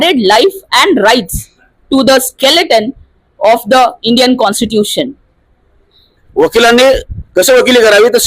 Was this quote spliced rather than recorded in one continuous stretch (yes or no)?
yes